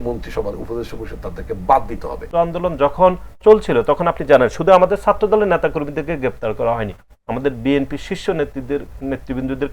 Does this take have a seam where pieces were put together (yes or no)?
yes